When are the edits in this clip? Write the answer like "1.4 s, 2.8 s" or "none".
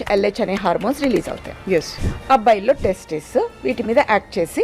2.0 s